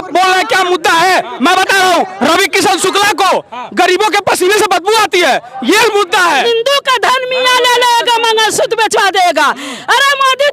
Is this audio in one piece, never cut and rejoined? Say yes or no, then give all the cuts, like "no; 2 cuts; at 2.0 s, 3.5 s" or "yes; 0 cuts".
no; 1 cut; at 6.4 s